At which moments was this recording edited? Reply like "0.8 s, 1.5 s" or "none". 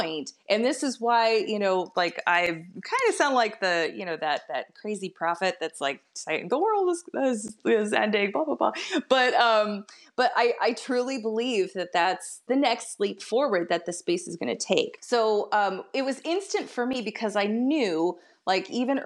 15.0 s